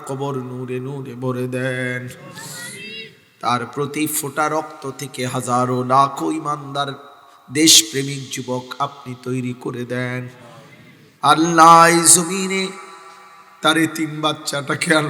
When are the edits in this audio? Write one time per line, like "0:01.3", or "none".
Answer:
none